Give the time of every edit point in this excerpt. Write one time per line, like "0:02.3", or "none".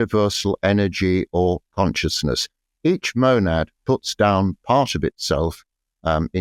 none